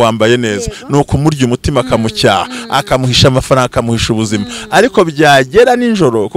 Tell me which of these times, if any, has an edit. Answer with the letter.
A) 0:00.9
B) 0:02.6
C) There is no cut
C